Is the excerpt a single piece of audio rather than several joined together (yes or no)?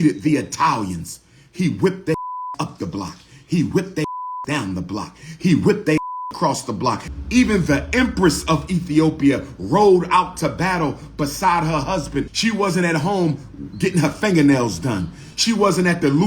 no